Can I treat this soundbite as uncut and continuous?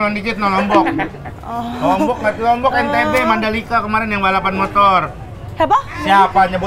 yes; 0 cuts

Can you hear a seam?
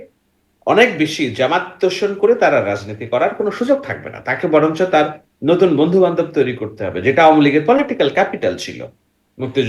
no; 0 cuts

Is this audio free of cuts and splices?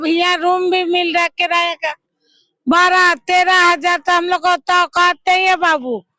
yes; 0 cuts

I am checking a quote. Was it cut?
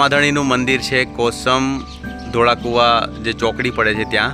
no; 0 cuts

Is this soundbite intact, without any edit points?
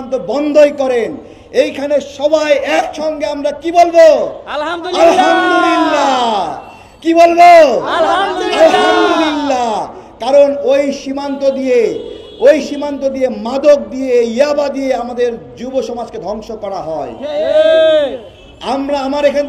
yes; 0 cuts

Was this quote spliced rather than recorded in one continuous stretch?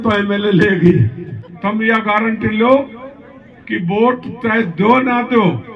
yes; 1 cut; at 1.5 s

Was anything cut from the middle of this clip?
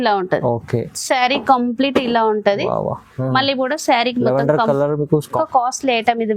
yes; 1 cut; at 5.4 s

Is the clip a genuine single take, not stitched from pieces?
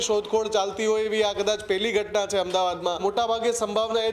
no; 1 cut; at 3.0 s

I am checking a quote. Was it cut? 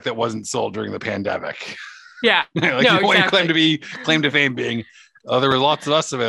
no; 0 cuts

